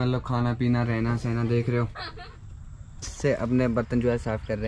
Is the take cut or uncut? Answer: cut